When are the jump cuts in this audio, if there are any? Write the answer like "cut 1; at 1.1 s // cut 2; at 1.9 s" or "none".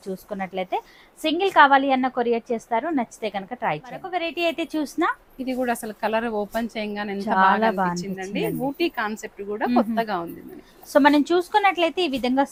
none

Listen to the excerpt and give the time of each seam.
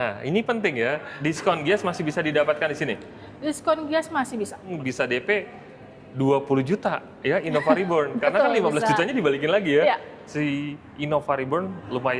cut 1; at 1.1 s // cut 2; at 4.7 s // cut 3; at 10.2 s

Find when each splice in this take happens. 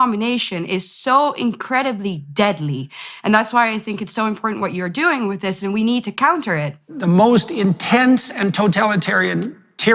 cut 1; at 6.9 s

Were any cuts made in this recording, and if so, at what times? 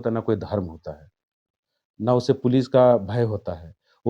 none

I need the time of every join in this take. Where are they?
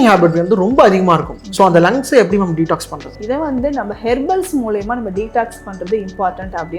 cut 1; at 1.4 s // cut 2; at 3.2 s

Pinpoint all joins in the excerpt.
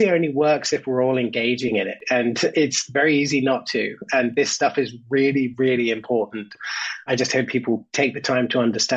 none

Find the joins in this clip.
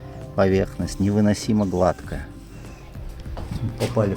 cut 1; at 2.8 s

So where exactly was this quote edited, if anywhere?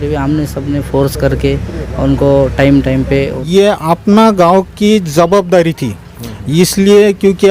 cut 1; at 3.4 s

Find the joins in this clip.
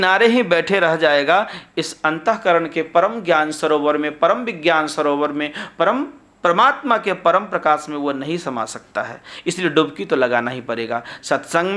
none

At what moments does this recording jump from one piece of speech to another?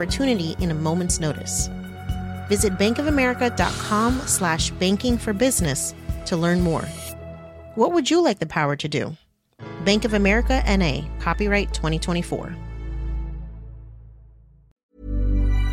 cut 1; at 14.6 s

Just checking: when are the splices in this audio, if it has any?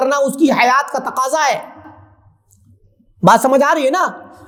none

